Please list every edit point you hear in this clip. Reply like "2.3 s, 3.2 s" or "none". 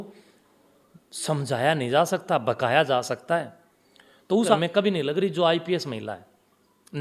4.6 s